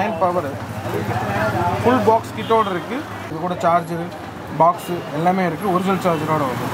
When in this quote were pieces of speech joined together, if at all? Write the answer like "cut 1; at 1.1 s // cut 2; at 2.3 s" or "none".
cut 1; at 3.2 s